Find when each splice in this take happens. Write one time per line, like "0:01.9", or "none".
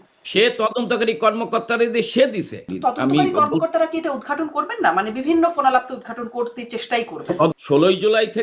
0:02.7
0:07.5